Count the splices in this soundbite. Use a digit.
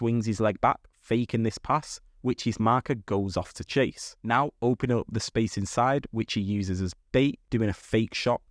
2